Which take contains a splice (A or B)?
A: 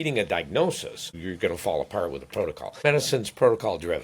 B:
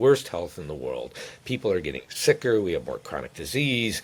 A